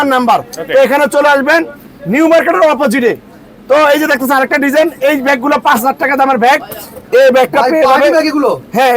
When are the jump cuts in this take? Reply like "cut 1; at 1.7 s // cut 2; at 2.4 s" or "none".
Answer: none